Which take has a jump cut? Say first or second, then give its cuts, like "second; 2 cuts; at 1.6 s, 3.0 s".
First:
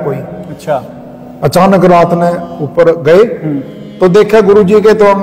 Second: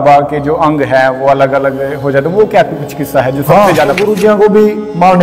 second; 1 cut; at 4.0 s